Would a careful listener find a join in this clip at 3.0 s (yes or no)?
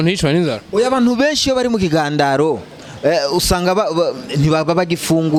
no